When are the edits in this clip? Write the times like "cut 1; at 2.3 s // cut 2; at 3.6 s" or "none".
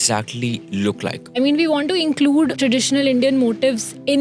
cut 1; at 1.3 s // cut 2; at 2.5 s